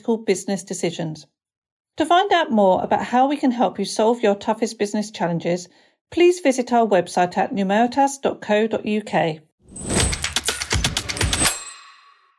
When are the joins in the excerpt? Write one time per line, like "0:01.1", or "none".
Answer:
0:09.5
0:11.5